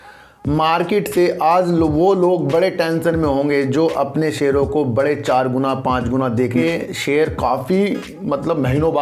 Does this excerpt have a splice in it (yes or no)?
yes